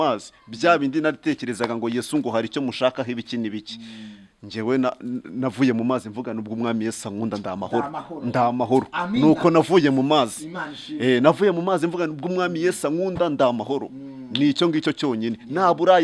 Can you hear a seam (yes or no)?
no